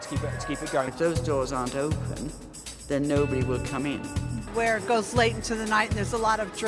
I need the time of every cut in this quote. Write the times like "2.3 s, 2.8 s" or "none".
0.9 s, 4.5 s